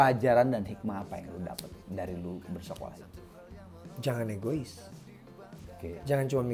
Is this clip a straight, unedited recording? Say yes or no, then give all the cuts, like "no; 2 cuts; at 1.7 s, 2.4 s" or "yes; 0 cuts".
yes; 0 cuts